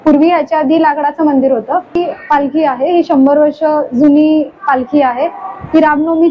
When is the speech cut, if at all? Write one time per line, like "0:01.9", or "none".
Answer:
0:02.0